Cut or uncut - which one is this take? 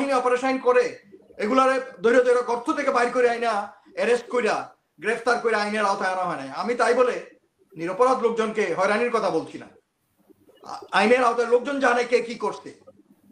uncut